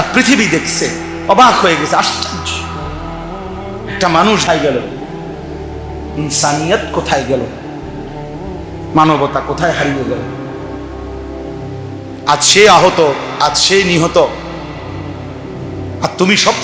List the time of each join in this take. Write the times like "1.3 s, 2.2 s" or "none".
4.8 s, 6.2 s, 7.5 s, 8.9 s, 10.2 s, 12.1 s